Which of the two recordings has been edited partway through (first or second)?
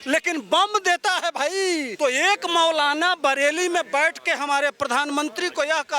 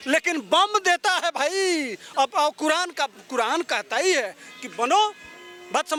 first